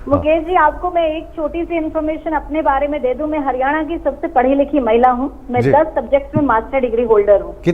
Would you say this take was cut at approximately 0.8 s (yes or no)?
no